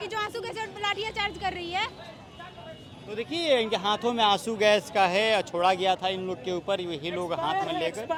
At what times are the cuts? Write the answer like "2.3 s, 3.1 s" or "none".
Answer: none

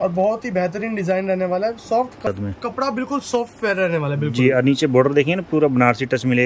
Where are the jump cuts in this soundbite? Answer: 2.3 s

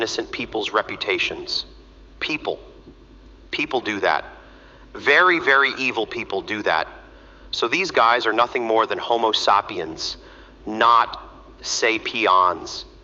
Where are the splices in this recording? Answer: none

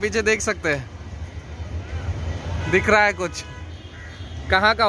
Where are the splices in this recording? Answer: none

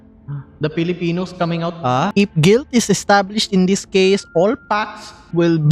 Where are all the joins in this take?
1.9 s

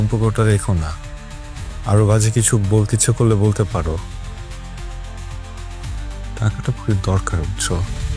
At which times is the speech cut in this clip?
none

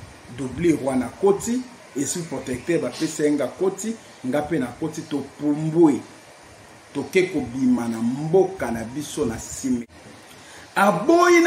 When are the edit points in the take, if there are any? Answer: 9.9 s

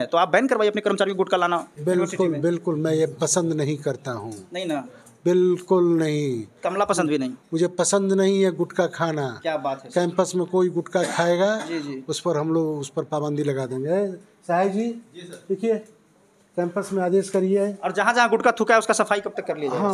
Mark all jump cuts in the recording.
none

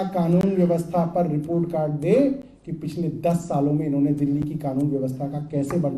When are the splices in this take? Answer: none

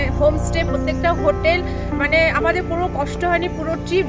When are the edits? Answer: none

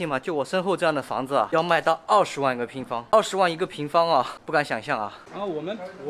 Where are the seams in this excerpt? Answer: 1.5 s, 3.1 s, 4.4 s, 5.2 s

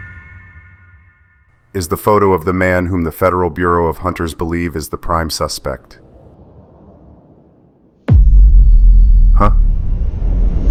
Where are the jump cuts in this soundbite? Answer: none

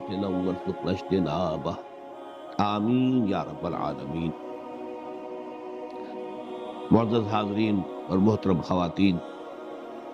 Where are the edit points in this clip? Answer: 9.2 s

